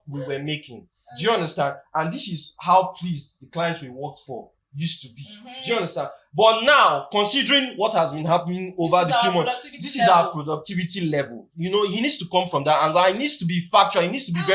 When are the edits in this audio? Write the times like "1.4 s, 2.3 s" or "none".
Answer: none